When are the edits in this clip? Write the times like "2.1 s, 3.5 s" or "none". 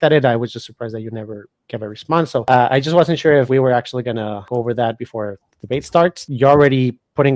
2.4 s, 3.5 s, 4.4 s, 6.2 s